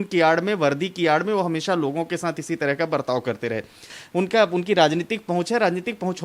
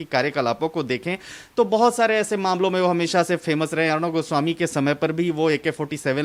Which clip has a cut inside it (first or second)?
first